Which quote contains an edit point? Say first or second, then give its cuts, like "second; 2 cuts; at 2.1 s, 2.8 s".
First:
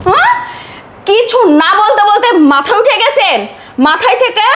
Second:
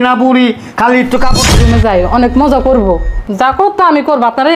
second; 1 cut; at 1.4 s